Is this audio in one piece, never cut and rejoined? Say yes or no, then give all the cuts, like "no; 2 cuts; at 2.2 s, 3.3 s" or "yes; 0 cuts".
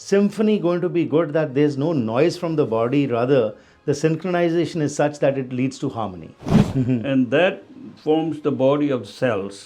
no; 1 cut; at 6.6 s